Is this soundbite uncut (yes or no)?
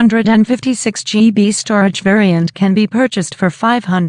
no